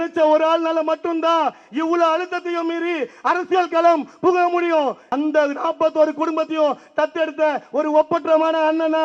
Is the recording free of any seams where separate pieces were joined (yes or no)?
no